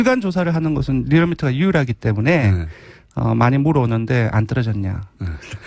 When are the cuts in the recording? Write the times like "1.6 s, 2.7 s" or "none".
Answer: none